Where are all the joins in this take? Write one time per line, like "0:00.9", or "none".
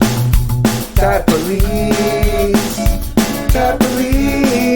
none